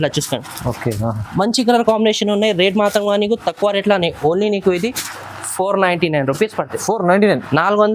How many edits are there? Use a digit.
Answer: 0